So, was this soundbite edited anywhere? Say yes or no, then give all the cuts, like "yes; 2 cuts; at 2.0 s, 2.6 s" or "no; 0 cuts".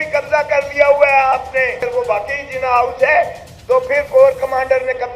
yes; 1 cut; at 1.8 s